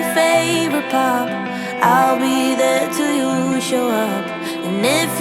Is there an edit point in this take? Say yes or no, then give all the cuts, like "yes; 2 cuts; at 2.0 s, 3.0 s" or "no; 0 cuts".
no; 0 cuts